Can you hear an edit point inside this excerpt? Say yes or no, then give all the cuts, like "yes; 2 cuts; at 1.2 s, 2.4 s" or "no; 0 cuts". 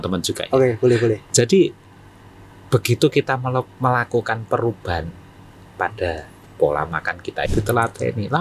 yes; 1 cut; at 7.4 s